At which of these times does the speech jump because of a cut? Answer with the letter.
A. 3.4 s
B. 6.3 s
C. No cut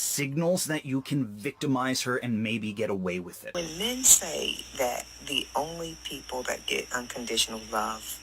A